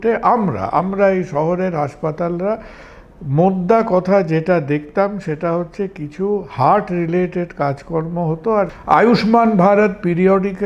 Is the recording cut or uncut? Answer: cut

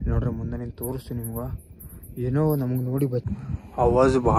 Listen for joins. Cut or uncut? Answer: cut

